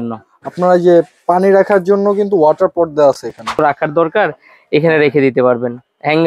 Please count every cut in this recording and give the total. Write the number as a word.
one